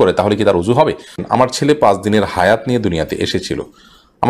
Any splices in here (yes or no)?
yes